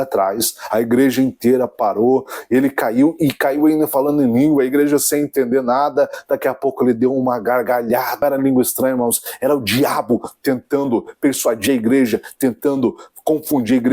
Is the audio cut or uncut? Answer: cut